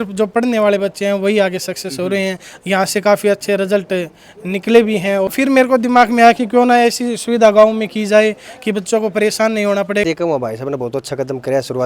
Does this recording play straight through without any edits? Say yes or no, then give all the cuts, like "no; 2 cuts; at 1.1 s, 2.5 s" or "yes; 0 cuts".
no; 2 cuts; at 5.3 s, 10.0 s